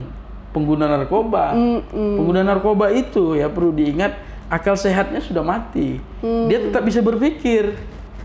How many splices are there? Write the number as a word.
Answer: zero